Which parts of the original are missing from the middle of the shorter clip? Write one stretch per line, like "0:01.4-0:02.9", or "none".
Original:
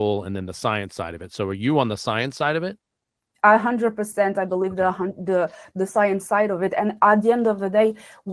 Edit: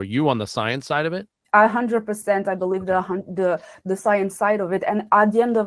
0:02.8-0:03.2